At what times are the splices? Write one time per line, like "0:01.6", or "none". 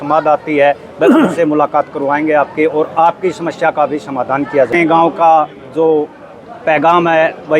0:04.7